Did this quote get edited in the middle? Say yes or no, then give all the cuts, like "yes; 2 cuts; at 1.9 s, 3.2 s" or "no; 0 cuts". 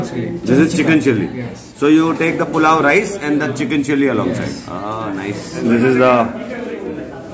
yes; 1 cut; at 5.6 s